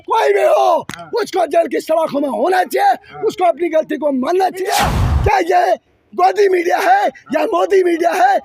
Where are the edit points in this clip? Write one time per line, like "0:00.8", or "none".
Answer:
0:04.7